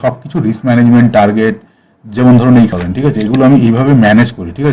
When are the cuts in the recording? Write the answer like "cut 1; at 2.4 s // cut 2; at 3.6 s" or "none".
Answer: cut 1; at 2.7 s